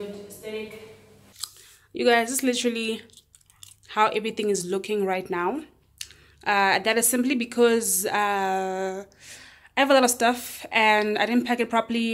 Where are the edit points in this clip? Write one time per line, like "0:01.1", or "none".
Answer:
0:01.3